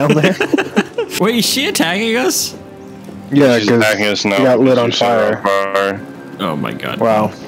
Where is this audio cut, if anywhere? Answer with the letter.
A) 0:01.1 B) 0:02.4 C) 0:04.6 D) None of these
A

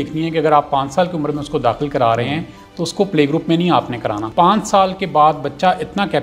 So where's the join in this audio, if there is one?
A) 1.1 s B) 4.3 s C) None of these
B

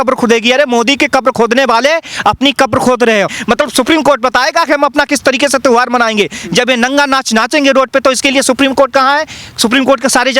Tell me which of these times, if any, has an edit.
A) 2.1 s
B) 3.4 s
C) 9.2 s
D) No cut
B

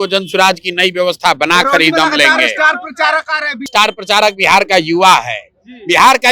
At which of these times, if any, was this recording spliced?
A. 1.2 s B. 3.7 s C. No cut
B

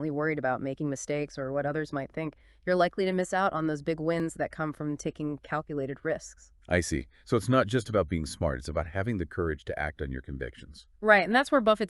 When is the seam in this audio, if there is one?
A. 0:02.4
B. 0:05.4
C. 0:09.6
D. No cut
B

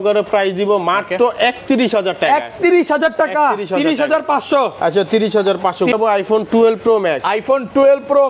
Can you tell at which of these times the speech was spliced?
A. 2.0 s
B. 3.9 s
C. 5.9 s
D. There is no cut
C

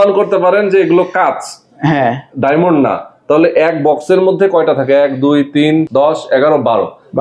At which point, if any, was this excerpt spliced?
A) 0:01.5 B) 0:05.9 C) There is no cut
B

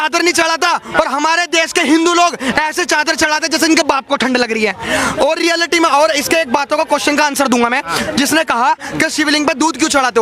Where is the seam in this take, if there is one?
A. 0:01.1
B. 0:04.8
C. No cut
C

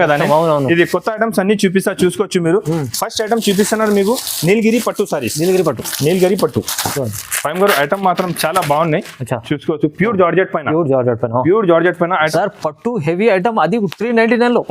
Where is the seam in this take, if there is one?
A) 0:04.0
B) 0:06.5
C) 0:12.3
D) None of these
C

